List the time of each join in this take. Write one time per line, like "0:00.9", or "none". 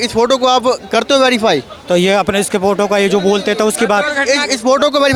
none